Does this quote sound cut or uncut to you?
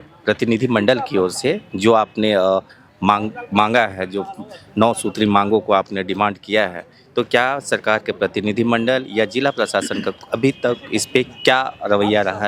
uncut